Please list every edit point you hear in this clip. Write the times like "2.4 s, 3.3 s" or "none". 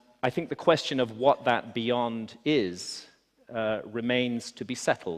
2.2 s